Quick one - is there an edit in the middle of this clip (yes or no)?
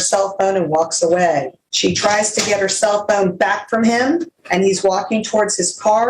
yes